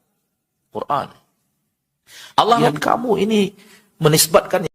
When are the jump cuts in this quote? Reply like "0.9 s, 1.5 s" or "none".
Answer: 2.7 s